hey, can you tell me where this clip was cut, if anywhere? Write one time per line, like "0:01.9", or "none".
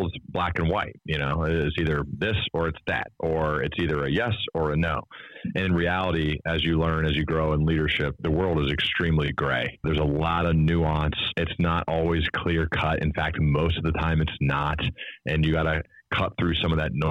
0:08.2
0:09.8
0:11.3
0:15.8